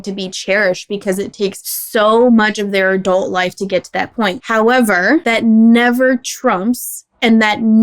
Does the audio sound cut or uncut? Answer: cut